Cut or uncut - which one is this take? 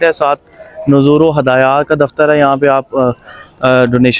uncut